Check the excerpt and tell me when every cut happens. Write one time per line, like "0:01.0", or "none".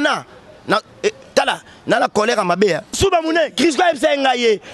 0:03.0